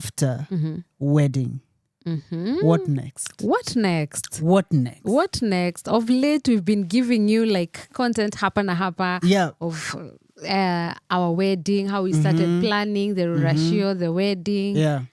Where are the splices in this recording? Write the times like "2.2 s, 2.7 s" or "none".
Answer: none